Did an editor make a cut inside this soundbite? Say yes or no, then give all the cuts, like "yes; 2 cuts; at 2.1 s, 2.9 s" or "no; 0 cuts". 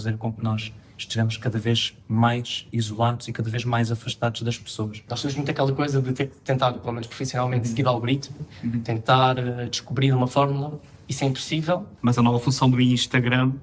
yes; 2 cuts; at 5.1 s, 11.9 s